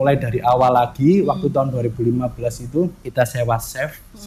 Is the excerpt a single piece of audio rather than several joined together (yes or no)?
no